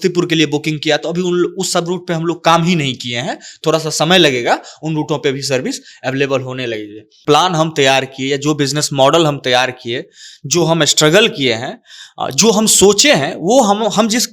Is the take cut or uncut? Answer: cut